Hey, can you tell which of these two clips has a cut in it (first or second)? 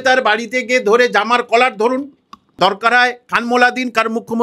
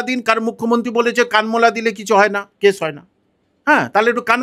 first